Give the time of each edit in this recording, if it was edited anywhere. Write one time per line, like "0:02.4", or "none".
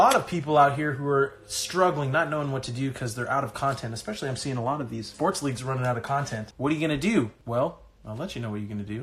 0:05.1
0:06.4
0:07.4